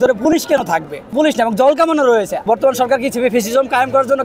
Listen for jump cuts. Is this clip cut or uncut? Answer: cut